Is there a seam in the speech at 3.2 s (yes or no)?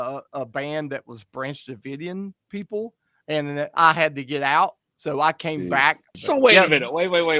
no